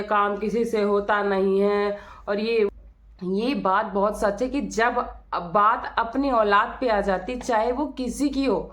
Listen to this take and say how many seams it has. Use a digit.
1